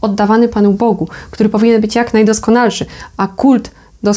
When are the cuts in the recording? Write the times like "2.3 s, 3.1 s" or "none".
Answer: none